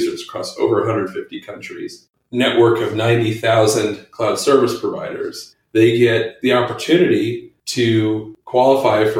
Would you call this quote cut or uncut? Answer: cut